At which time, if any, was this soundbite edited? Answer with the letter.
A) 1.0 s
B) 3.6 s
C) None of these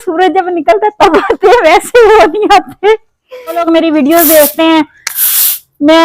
B